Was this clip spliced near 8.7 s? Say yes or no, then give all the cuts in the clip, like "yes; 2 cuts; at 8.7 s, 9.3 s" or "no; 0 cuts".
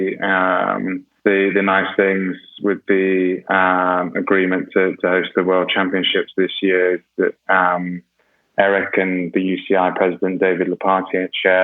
no; 1 cut; at 1.1 s